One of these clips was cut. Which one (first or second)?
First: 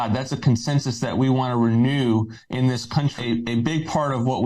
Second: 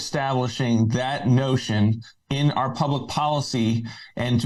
first